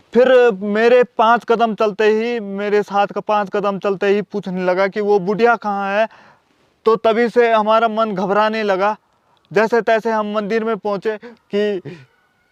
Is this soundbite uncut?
no; 1 cut; at 11.3 s

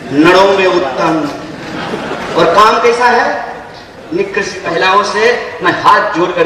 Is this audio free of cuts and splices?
no; 1 cut; at 4.6 s

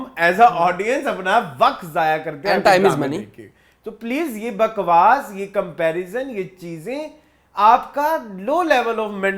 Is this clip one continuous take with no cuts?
yes; 0 cuts

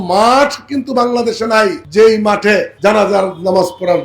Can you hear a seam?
yes; 2 cuts; at 1.8 s, 2.7 s

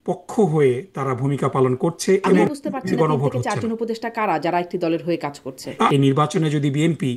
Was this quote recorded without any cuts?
no; 2 cuts; at 2.3 s, 5.9 s

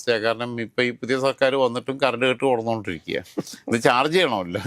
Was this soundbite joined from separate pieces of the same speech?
no; 0 cuts

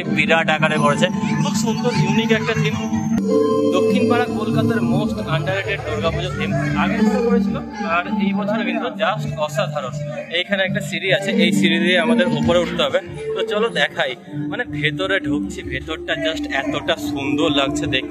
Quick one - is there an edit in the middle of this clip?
no; 0 cuts

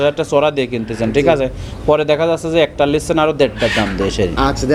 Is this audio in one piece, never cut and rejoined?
yes; 0 cuts

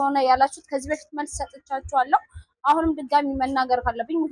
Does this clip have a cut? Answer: no; 0 cuts

